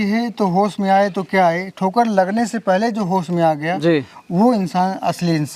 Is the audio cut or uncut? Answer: uncut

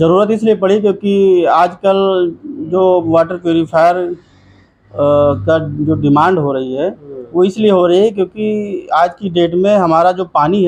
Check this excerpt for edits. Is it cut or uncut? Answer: uncut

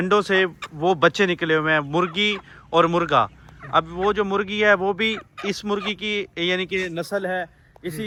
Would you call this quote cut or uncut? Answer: uncut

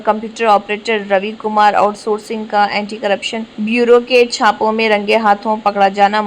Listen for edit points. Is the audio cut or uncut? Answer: cut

